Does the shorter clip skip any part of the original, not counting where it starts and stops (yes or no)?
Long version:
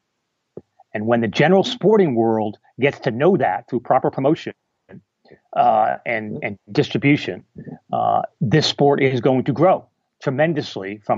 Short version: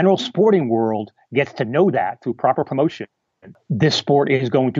yes